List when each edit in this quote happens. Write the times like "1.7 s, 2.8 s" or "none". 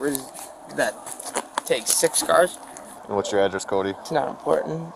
2.9 s, 4.0 s